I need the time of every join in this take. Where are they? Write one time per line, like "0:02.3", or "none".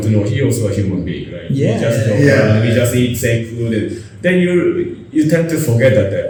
none